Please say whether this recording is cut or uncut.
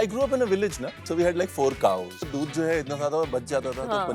cut